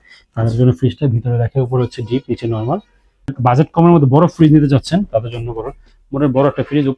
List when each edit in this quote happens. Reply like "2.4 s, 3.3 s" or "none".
3.3 s